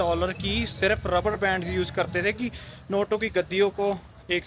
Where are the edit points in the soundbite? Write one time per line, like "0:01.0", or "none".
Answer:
none